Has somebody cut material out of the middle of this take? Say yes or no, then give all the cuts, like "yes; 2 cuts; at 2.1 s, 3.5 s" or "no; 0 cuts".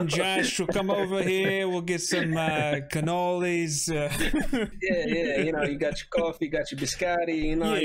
yes; 1 cut; at 4.7 s